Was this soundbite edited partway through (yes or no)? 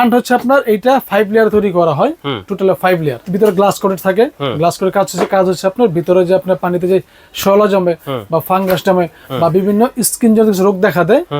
yes